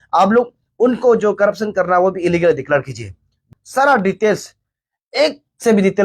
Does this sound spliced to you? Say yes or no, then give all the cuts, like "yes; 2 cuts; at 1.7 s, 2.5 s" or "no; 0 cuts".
yes; 1 cut; at 3.5 s